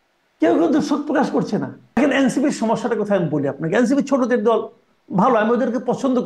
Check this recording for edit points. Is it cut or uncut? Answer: cut